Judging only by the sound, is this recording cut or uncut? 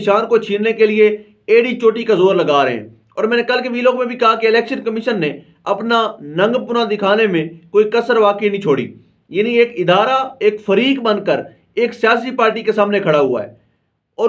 uncut